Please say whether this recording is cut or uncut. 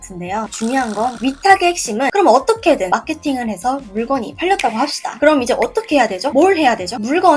cut